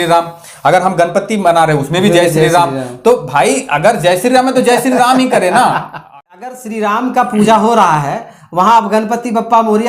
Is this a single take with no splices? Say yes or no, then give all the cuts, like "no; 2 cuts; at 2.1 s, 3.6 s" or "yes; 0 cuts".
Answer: no; 1 cut; at 6.0 s